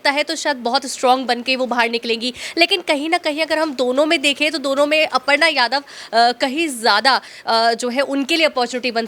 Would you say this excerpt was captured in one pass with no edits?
yes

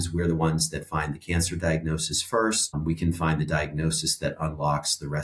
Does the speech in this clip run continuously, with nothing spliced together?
no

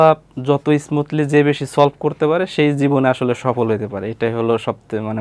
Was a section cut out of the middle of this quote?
no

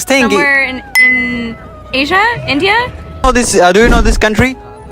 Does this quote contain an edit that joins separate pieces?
yes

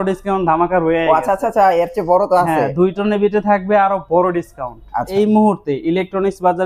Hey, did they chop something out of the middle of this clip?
yes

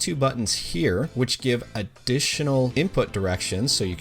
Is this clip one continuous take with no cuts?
no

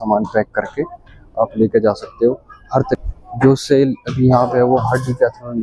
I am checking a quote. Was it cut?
yes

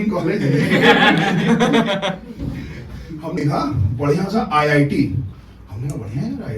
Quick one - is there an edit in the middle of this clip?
yes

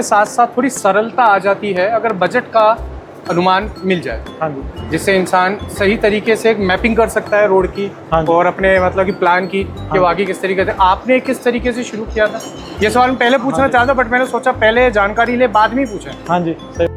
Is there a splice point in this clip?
no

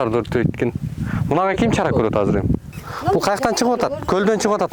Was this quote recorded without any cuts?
no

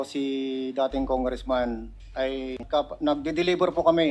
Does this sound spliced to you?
yes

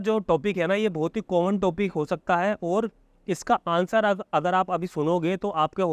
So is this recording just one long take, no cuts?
yes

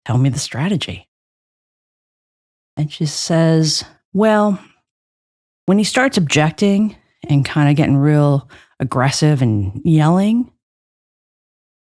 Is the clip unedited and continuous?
yes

